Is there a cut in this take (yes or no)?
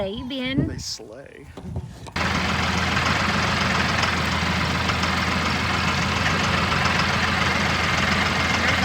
yes